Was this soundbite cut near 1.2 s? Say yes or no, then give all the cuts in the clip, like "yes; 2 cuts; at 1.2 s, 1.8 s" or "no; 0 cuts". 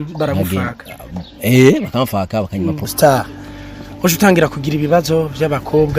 no; 1 cut; at 2.8 s